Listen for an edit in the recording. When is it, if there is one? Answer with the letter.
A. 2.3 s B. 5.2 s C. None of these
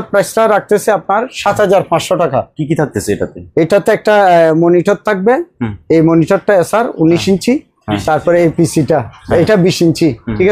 C